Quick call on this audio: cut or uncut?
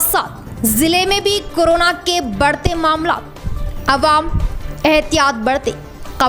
uncut